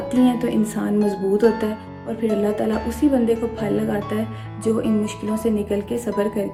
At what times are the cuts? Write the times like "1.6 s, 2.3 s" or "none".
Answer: none